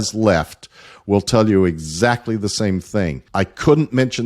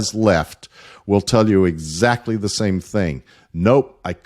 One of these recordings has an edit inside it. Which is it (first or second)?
first